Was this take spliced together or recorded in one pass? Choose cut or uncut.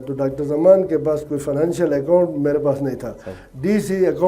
uncut